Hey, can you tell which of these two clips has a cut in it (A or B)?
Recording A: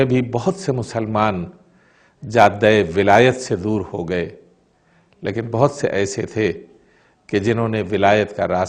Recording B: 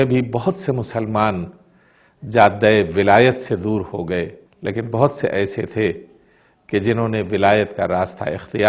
B